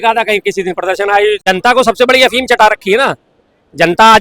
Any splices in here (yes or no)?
yes